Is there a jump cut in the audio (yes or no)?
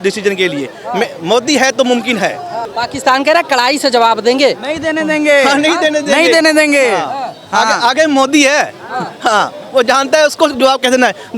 no